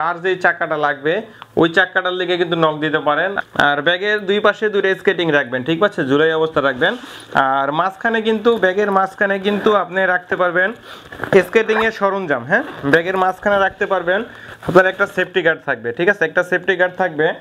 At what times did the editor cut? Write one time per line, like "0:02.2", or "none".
0:03.4